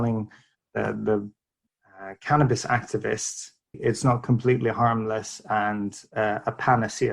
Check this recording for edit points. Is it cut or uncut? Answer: cut